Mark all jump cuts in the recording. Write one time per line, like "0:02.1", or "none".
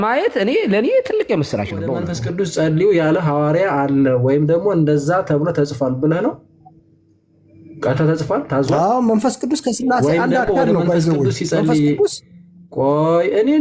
0:02.2